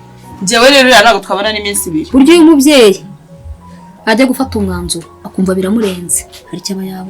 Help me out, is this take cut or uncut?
cut